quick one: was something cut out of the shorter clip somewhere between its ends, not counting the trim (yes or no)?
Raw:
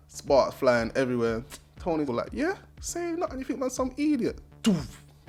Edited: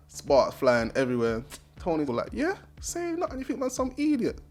no